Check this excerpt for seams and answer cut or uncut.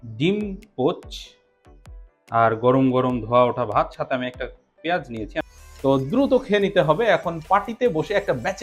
cut